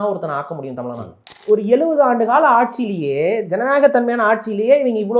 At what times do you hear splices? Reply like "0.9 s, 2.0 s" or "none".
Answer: 1.3 s